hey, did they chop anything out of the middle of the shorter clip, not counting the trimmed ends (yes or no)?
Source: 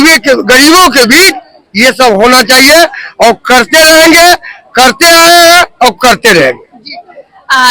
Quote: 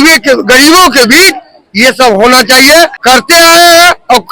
yes